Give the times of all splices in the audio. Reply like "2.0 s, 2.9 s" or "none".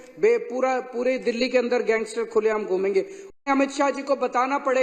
3.3 s